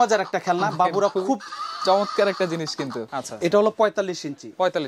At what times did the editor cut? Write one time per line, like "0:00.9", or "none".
0:03.1